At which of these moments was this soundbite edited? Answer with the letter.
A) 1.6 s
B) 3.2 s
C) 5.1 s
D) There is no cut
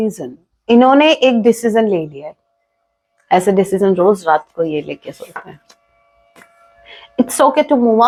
D